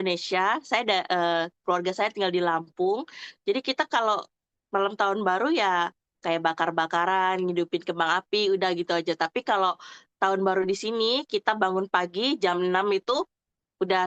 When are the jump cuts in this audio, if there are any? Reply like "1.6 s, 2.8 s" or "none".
none